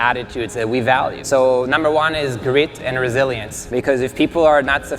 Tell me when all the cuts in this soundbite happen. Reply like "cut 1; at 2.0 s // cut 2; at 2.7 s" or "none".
cut 1; at 1.2 s // cut 2; at 3.5 s